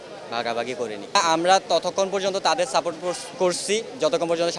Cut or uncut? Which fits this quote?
cut